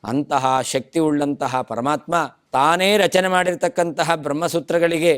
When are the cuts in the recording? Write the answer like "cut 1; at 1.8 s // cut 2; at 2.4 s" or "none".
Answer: cut 1; at 2.4 s